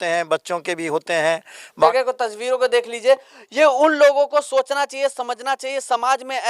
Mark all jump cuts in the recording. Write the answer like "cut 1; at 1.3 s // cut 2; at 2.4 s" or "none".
cut 1; at 1.9 s